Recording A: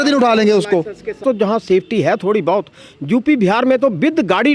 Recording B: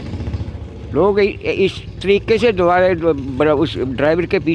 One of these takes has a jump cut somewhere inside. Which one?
A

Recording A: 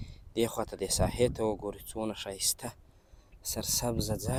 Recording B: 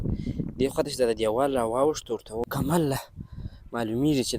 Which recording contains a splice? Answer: B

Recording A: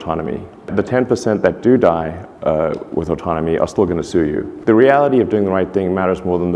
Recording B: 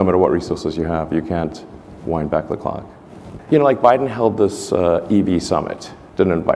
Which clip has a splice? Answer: A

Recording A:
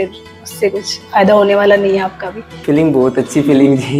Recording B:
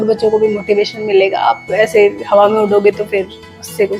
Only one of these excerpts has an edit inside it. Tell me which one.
A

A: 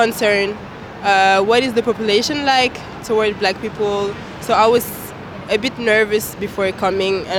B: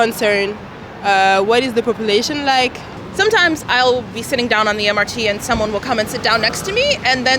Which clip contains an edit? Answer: B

